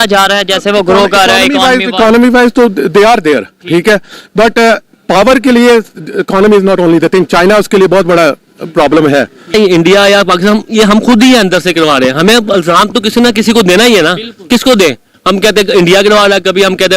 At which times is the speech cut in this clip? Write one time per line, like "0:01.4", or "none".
0:09.5